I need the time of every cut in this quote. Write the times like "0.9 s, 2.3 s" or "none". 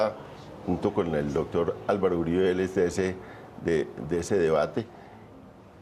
4.3 s